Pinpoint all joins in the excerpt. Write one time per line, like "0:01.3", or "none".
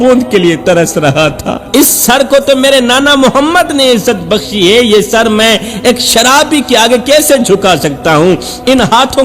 0:01.6